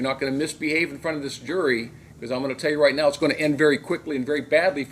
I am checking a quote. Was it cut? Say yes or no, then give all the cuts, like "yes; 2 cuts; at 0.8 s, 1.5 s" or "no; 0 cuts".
no; 0 cuts